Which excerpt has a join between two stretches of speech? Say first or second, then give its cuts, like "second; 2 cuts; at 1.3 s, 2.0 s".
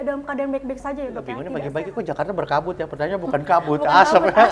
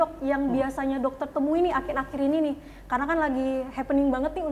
first; 1 cut; at 1.4 s